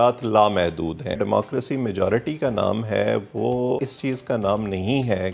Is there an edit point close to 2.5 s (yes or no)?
no